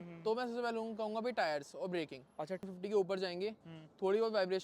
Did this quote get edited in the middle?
yes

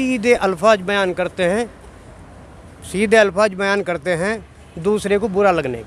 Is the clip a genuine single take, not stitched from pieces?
yes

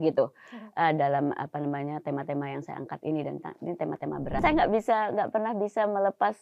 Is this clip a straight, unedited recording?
no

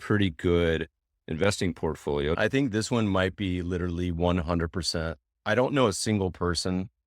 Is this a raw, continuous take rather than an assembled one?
no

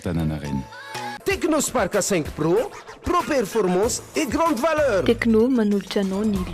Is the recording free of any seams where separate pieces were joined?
no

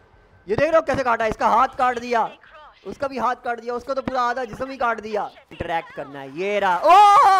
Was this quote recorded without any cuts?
no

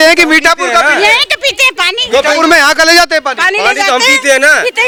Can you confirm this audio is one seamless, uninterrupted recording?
yes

